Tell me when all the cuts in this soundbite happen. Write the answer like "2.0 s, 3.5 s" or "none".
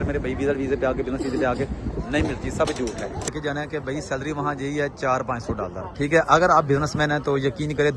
3.3 s, 5.8 s